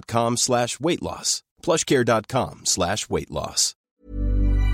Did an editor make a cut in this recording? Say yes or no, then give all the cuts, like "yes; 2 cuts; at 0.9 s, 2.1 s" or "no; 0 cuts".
yes; 1 cut; at 3.7 s